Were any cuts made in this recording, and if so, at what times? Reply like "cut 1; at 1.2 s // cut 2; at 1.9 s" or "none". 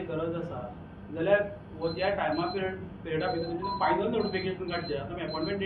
none